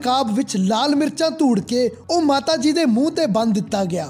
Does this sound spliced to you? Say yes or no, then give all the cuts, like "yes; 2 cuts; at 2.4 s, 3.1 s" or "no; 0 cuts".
no; 0 cuts